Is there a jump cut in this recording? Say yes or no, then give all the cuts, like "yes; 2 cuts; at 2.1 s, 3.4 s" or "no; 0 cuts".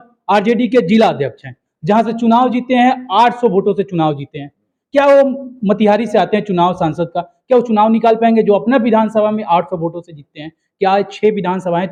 no; 0 cuts